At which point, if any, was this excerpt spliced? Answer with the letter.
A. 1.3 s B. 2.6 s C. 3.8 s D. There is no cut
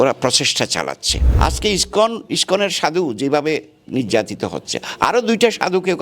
A